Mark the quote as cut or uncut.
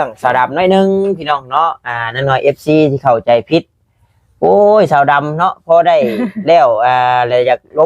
uncut